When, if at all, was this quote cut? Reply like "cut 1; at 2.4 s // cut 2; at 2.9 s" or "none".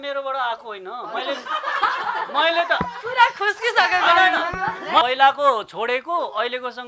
cut 1; at 5.0 s